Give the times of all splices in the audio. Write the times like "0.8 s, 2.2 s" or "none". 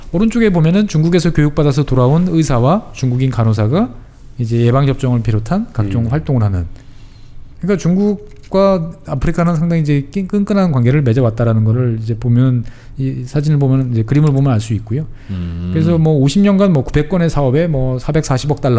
none

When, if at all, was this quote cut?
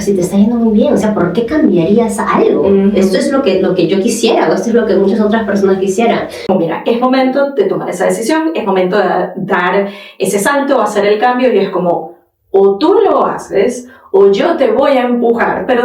6.4 s

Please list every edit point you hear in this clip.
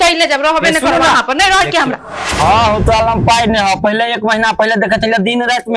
1.9 s

